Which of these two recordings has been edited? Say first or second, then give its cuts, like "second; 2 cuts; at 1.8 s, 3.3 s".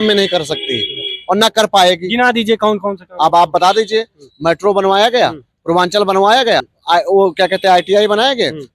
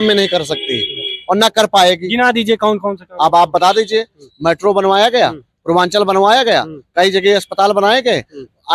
first; 1 cut; at 6.7 s